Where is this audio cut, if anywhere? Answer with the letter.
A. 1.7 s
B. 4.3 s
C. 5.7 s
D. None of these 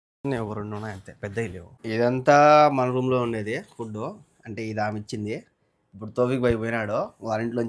A